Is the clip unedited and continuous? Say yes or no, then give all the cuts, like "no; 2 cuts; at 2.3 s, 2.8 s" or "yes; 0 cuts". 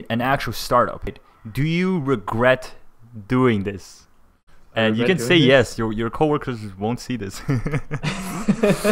no; 1 cut; at 1.2 s